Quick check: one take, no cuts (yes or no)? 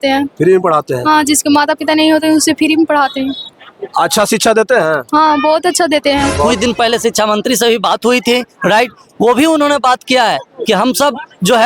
no